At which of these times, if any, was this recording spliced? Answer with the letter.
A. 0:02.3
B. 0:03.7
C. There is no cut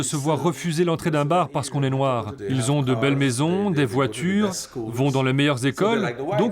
A